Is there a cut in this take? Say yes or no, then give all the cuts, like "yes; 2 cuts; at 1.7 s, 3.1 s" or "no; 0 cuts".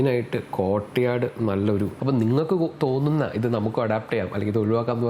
yes; 1 cut; at 1.9 s